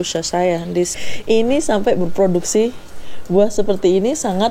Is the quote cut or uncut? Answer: cut